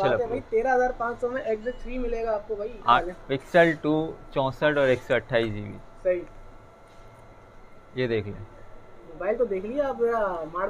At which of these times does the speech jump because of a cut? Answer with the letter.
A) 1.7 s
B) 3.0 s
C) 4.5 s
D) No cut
B